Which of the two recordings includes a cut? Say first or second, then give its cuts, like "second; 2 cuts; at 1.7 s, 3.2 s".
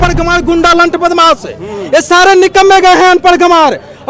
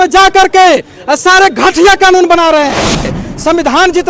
second; 1 cut; at 3.1 s